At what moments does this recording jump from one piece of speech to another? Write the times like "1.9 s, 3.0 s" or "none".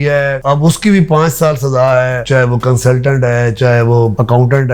none

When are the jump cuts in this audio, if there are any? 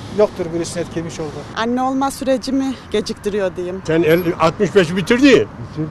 1.4 s, 3.8 s

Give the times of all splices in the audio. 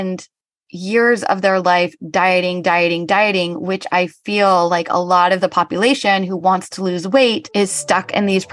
7.4 s

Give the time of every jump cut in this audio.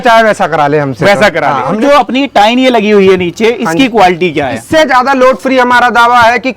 1.8 s, 4.6 s

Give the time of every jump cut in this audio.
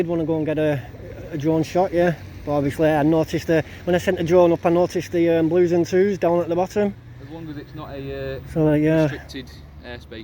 none

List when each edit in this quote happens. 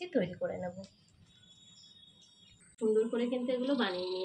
2.8 s

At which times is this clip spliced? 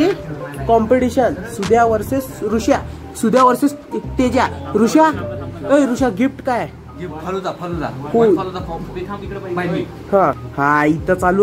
10.5 s

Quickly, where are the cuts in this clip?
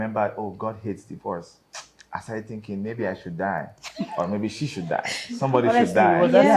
none

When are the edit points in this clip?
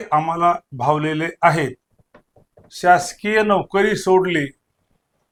none

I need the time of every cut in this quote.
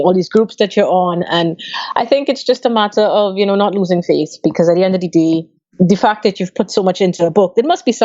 5.7 s

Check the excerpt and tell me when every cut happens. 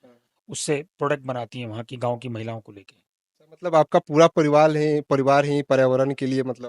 none

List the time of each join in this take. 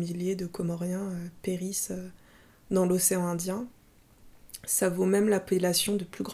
none

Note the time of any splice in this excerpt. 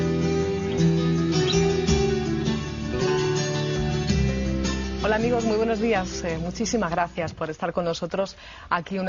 1.0 s

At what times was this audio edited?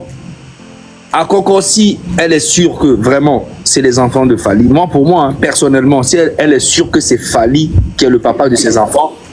none

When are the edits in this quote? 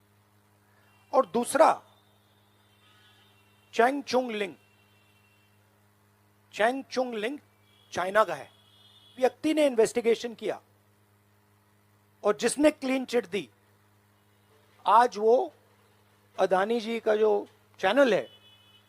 9.1 s

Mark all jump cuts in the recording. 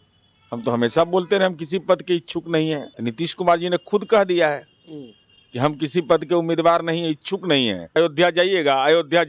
2.9 s, 8.0 s

